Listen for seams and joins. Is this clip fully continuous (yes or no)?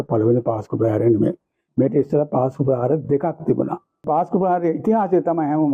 no